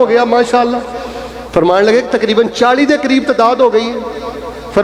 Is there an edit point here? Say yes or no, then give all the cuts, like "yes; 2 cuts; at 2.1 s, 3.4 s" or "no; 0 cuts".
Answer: no; 0 cuts